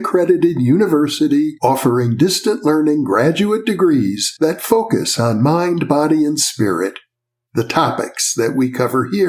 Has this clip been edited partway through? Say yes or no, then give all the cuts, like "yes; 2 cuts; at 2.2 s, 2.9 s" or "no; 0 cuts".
no; 0 cuts